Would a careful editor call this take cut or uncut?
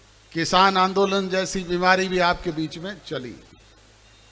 uncut